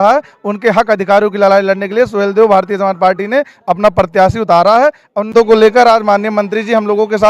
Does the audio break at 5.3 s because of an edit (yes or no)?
yes